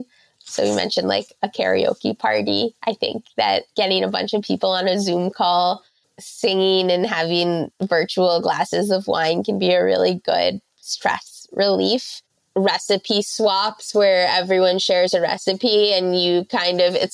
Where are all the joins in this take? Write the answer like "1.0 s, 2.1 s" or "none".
6.1 s, 12.4 s